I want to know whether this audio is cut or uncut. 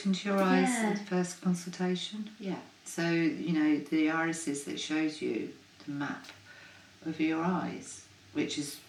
uncut